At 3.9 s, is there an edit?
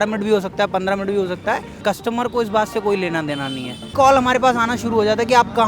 yes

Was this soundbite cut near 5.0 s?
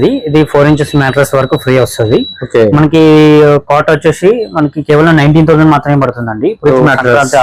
no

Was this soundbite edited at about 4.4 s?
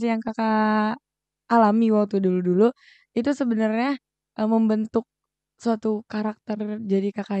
no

